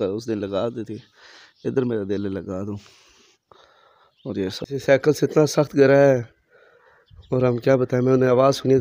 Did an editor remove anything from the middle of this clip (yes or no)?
yes